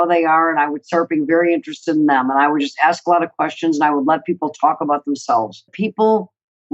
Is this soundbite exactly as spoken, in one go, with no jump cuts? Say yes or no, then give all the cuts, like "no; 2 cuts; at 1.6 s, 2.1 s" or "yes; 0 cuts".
no; 1 cut; at 5.7 s